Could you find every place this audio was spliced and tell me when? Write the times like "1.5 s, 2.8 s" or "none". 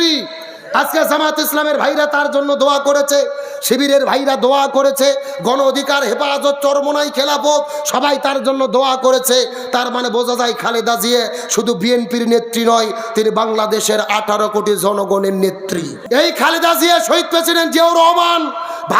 15.9 s